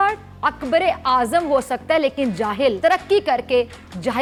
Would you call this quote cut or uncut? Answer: uncut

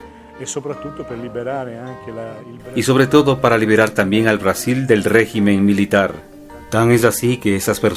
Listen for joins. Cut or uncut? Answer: uncut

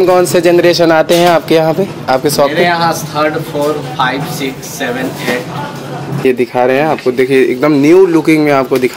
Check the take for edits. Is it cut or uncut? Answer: cut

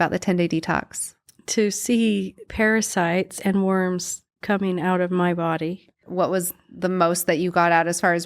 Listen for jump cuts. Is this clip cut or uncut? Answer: cut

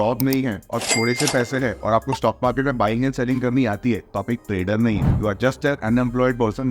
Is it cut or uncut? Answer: uncut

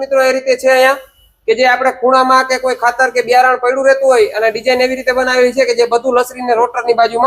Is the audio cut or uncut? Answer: uncut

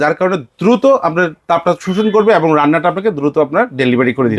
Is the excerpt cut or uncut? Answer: uncut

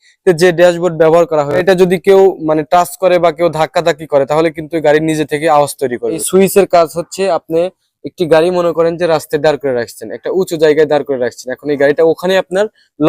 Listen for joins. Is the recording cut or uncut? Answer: cut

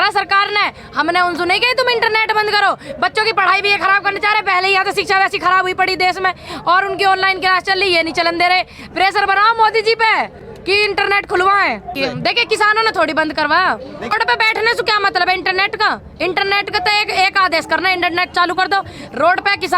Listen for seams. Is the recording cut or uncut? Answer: cut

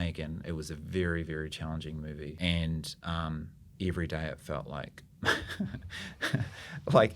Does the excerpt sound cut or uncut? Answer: cut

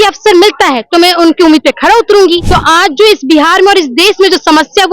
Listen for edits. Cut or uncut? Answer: cut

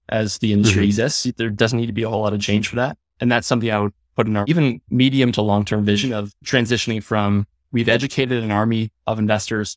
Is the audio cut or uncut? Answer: cut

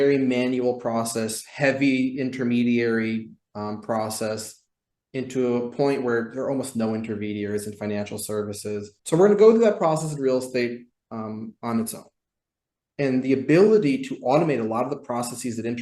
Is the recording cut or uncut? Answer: cut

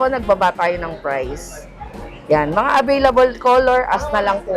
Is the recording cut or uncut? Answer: uncut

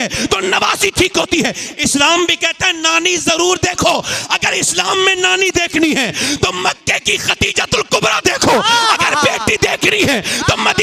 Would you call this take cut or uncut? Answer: uncut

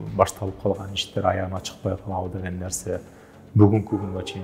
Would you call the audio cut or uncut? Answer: uncut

